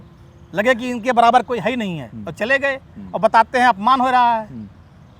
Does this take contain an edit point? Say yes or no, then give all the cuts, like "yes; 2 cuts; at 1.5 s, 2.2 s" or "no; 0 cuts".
no; 0 cuts